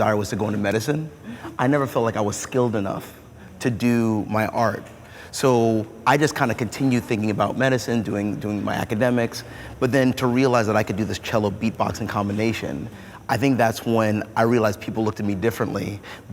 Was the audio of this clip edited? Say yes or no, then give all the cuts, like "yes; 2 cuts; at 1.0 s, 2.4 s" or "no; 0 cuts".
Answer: no; 0 cuts